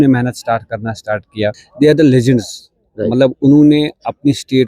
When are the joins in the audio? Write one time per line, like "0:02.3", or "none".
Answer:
0:01.6

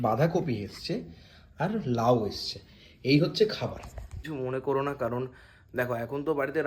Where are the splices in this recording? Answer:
0:04.1

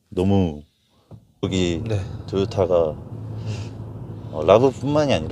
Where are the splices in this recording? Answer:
0:01.4

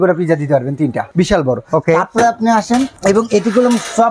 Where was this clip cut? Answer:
0:01.1
0:02.9

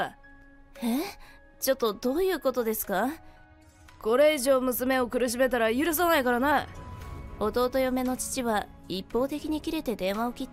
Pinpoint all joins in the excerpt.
0:03.7

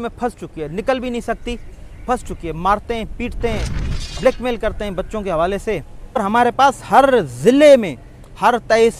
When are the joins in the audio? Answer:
0:06.2

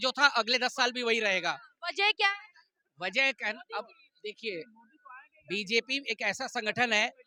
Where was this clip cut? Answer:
none

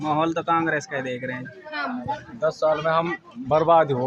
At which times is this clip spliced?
0:02.0

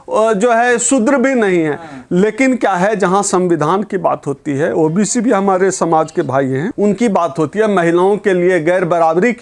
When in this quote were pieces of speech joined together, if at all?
none

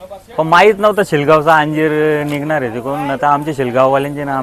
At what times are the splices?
none

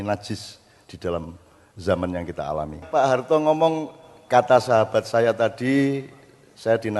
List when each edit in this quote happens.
0:02.9

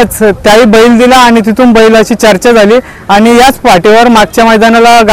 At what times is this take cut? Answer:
none

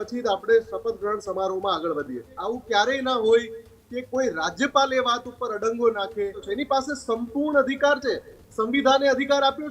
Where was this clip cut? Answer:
0:02.3
0:06.5

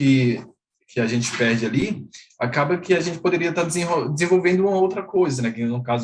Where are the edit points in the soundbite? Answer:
none

